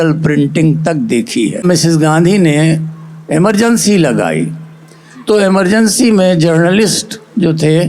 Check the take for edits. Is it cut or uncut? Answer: cut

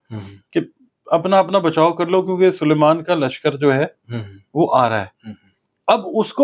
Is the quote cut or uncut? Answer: uncut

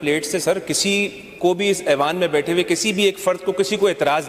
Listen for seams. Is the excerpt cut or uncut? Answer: uncut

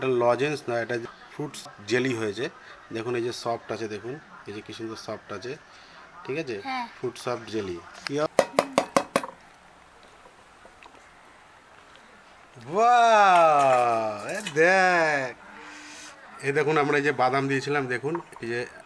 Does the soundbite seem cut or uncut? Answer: cut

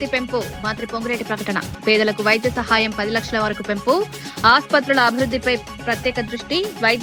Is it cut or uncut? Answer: uncut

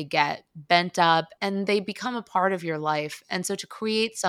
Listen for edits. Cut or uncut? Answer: uncut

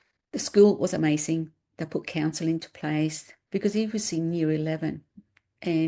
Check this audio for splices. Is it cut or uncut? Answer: cut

